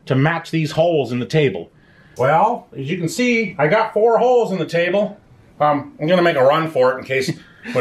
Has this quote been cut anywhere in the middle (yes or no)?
yes